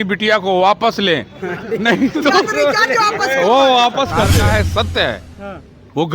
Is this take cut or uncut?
cut